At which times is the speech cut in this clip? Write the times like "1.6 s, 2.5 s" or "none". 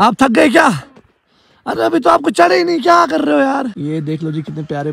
3.7 s